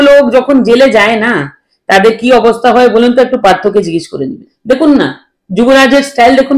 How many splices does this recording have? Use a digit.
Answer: 1